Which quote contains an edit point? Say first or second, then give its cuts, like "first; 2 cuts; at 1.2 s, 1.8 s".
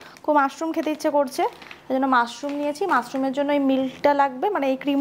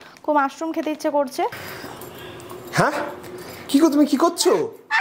second; 1 cut; at 1.7 s